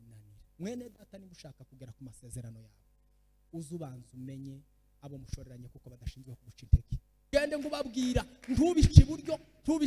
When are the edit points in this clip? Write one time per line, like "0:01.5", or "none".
0:07.3